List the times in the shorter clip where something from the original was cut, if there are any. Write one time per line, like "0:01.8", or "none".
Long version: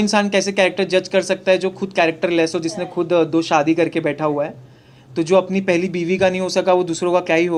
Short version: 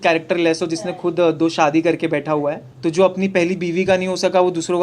0:02.7